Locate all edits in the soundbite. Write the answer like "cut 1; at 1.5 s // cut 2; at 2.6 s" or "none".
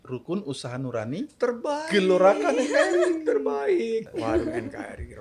cut 1; at 4.1 s